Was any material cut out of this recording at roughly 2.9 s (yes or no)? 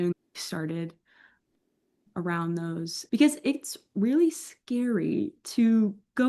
yes